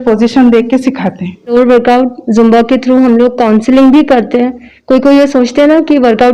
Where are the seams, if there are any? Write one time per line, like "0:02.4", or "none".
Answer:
0:01.5